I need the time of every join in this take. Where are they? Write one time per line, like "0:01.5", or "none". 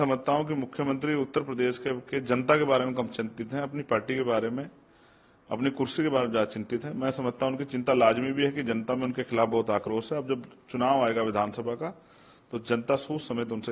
none